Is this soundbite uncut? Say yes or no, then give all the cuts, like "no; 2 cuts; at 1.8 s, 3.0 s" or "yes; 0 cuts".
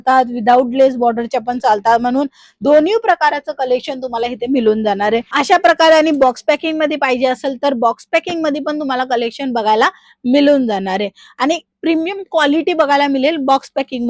yes; 0 cuts